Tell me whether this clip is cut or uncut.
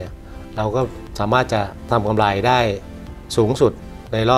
cut